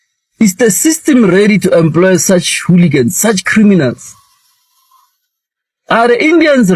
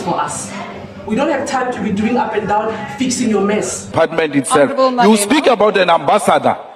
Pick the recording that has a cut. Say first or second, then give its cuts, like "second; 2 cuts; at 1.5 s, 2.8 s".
second; 1 cut; at 3.9 s